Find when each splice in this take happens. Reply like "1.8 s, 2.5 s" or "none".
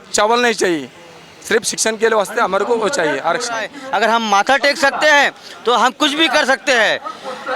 3.7 s